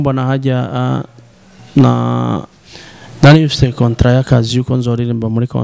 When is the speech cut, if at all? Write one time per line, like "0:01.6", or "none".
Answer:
none